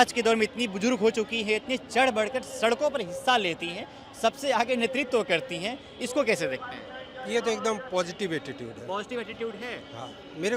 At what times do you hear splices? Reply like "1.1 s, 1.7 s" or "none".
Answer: none